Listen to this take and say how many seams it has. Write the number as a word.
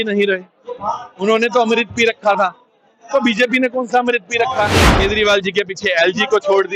one